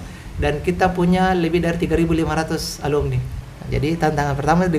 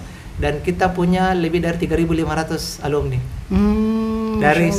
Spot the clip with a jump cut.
first; 1 cut; at 3.3 s

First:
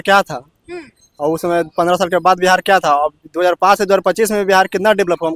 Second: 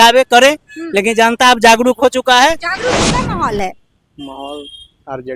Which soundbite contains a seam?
second; 1 cut; at 3.0 s

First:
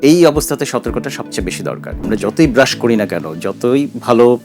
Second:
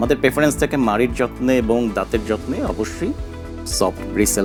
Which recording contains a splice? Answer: first; 1 cut; at 1.9 s

